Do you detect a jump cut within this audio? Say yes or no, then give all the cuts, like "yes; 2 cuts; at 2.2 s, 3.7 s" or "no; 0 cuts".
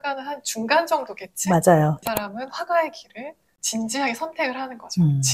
yes; 1 cut; at 2.0 s